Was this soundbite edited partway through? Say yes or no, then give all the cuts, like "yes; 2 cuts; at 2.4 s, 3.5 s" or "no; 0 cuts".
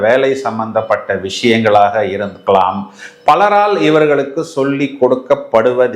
no; 0 cuts